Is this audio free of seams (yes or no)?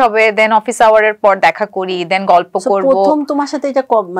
yes